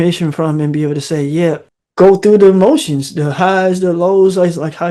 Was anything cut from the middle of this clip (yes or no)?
yes